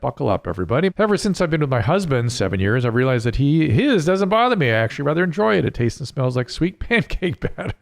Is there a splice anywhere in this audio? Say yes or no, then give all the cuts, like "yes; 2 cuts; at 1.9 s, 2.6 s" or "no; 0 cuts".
yes; 1 cut; at 0.9 s